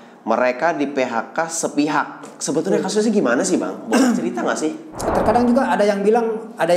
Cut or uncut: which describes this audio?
cut